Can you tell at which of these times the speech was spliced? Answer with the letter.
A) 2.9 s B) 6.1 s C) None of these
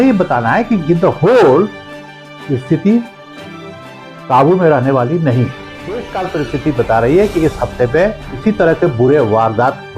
B